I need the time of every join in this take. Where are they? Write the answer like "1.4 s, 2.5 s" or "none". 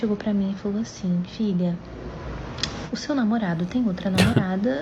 none